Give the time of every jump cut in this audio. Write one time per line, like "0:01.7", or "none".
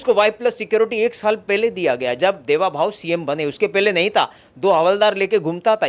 none

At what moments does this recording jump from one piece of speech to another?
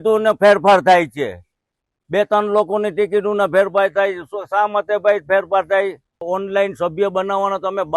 0:06.2

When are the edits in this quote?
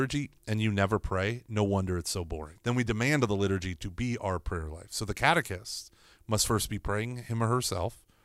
0:02.4

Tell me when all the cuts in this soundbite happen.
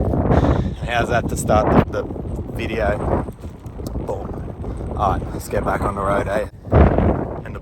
0:01.8
0:06.5

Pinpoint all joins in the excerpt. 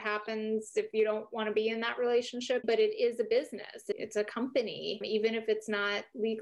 0:02.6

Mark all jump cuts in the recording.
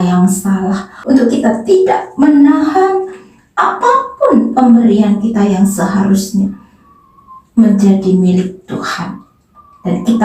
0:00.9

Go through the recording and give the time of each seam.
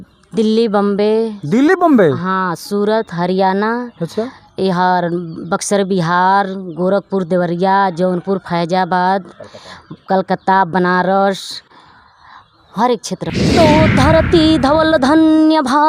0:13.2

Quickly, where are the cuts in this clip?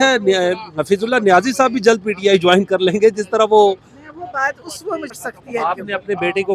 0:05.2

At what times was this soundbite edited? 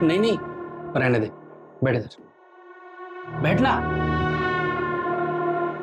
none

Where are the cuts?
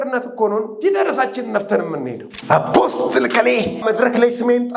0:02.3
0:03.8

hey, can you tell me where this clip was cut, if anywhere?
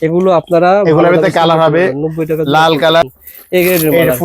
0:03.0

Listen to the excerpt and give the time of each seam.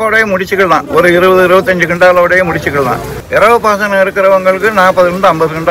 0:03.1

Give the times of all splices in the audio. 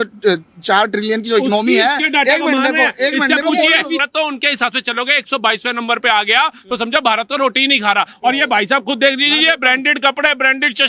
0:04.0

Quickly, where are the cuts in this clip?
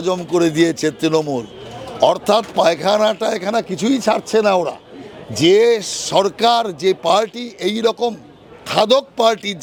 none

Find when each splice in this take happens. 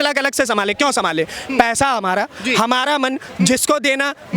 none

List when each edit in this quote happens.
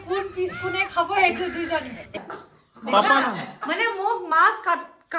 0:02.1

